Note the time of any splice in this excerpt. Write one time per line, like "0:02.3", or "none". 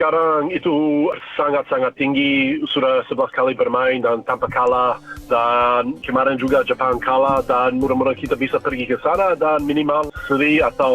0:01.2

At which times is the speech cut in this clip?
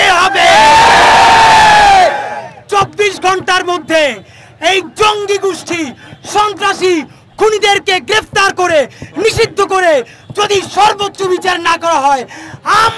none

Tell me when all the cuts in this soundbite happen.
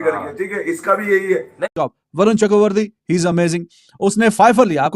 0:01.7

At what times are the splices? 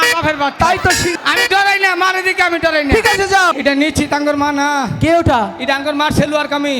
0:01.1
0:03.5

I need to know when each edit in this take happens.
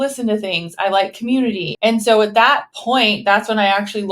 0:01.7
0:02.7

